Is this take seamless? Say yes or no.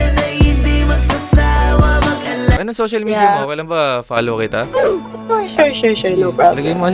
no